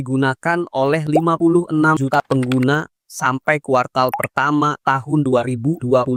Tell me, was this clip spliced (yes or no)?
no